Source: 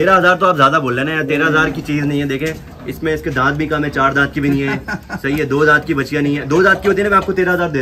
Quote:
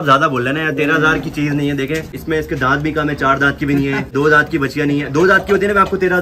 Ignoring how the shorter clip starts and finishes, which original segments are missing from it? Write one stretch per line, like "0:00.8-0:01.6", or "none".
0:02.6-0:02.9
0:04.9-0:05.5